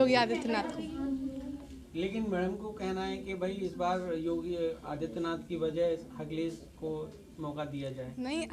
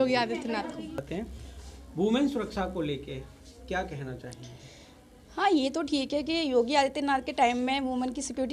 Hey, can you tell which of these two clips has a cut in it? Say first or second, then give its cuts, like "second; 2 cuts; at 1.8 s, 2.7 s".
second; 1 cut; at 1.0 s